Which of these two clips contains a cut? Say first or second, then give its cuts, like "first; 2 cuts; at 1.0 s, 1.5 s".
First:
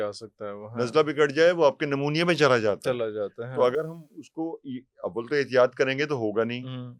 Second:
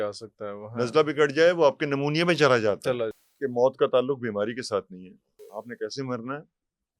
second; 2 cuts; at 3.1 s, 5.5 s